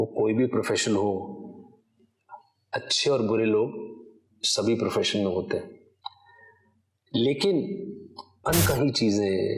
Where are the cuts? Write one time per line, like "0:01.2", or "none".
0:08.3